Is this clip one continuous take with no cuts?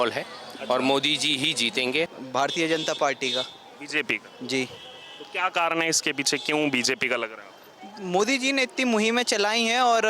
no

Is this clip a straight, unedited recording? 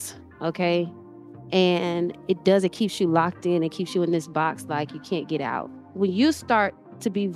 no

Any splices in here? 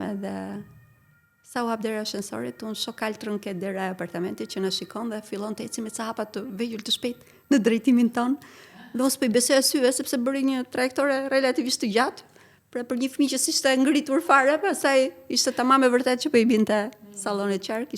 no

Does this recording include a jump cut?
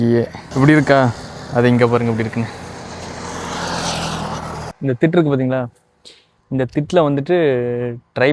no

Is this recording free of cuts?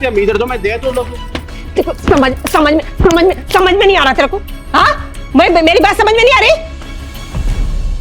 yes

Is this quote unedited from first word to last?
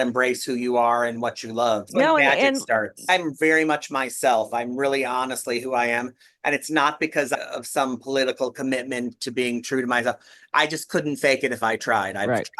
no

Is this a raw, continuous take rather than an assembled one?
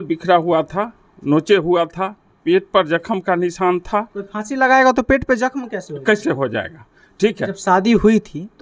no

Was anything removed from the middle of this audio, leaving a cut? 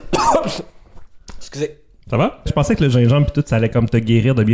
yes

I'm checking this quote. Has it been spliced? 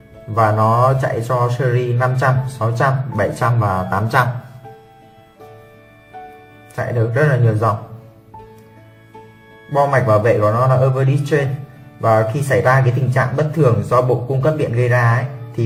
no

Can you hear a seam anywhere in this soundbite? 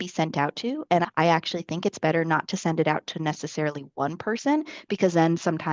yes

